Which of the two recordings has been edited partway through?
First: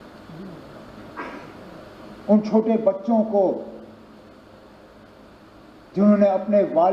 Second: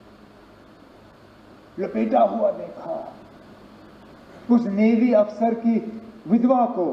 second; 1 cut; at 4.0 s

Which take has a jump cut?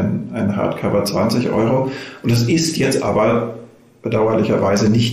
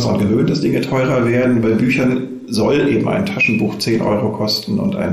first; 1 cut; at 3.9 s

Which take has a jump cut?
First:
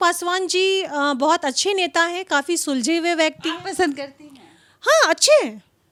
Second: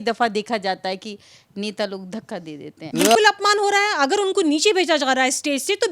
second; 1 cut; at 2.8 s

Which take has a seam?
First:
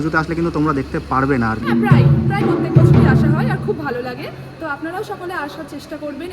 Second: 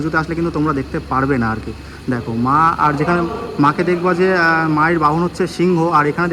first; 1 cut; at 1.7 s

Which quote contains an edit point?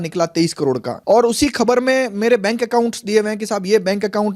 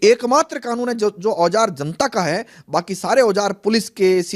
first; 1 cut; at 0.9 s

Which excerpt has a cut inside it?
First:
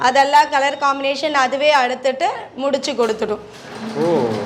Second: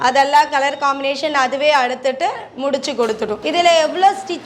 second; 1 cut; at 3.4 s

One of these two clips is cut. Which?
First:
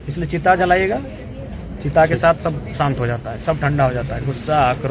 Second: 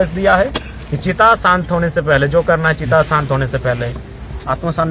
second; 1 cut; at 4.0 s

